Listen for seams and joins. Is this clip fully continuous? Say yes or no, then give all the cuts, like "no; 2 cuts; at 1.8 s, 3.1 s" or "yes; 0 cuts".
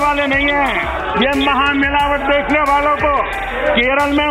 no; 2 cuts; at 0.9 s, 3.4 s